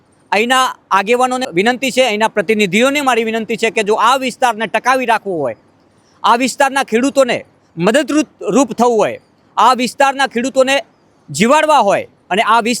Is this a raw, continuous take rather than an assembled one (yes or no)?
no